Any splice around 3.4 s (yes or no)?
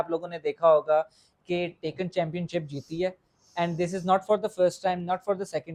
no